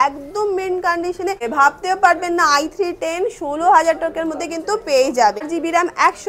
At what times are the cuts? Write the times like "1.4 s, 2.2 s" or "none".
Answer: 1.5 s, 5.5 s